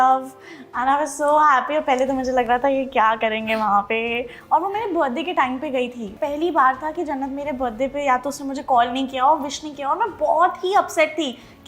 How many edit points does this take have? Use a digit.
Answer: 1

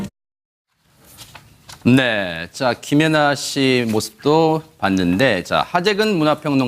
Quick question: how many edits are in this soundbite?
0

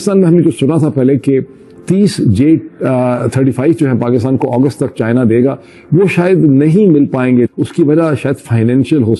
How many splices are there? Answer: 1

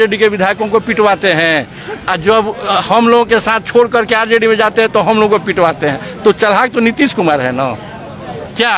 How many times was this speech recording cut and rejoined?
0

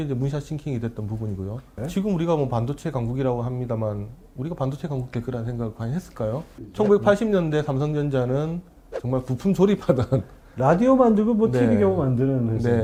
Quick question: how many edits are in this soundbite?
0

